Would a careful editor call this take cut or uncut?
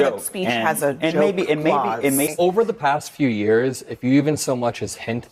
cut